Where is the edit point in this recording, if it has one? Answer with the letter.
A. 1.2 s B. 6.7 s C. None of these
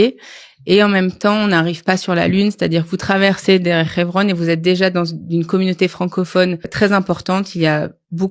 B